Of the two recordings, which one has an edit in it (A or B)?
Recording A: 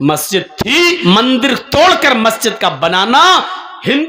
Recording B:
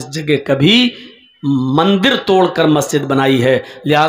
A